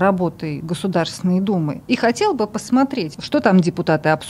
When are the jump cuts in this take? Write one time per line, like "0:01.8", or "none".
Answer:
0:01.8
0:03.2